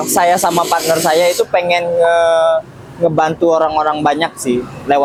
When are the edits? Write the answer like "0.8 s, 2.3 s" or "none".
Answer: none